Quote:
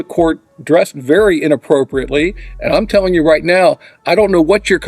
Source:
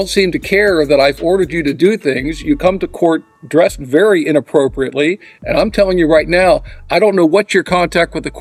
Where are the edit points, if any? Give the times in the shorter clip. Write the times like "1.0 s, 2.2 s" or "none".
none

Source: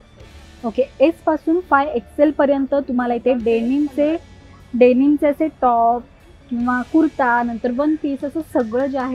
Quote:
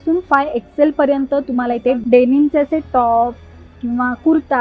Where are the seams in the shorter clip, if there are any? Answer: 2.0 s

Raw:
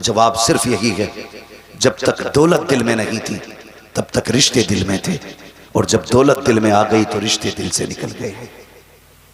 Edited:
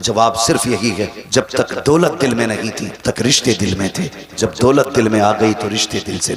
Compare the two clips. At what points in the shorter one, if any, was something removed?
1.2 s, 3.0 s, 4.4 s

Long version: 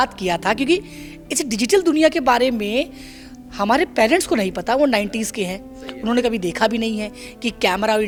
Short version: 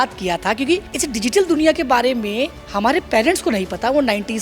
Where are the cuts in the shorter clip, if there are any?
0.9 s, 2.6 s

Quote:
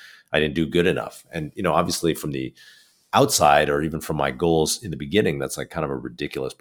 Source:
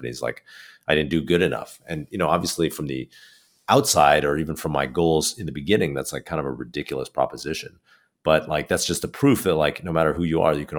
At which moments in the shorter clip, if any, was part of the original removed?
none

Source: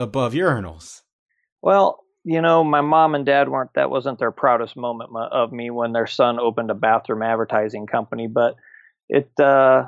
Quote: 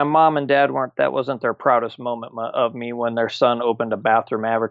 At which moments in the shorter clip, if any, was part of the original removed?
none

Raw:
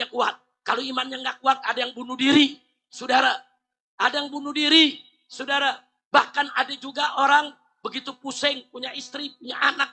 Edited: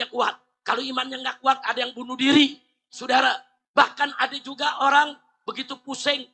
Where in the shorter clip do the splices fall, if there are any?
3.5 s

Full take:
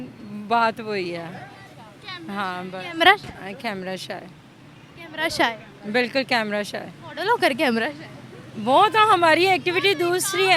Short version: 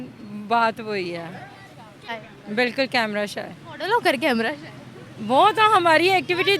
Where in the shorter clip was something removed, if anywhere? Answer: 2.2 s

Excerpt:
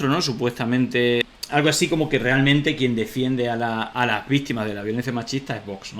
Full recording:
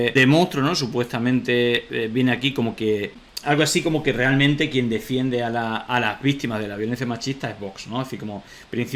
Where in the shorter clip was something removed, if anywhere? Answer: 1.3 s

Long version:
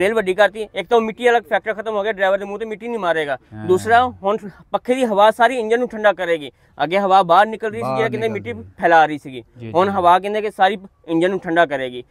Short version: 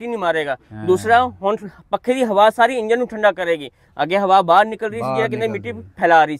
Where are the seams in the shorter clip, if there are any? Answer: none

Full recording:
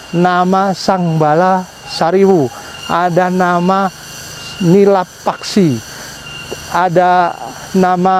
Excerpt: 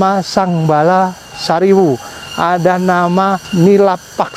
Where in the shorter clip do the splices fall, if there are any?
3.4 s

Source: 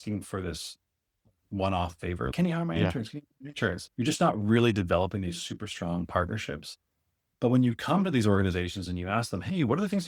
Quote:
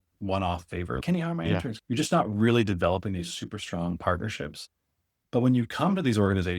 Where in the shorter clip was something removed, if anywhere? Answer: 1.8 s

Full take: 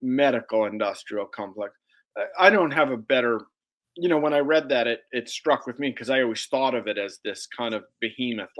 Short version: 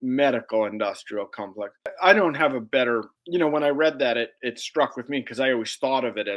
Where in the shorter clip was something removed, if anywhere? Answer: 1.9 s, 3.1 s

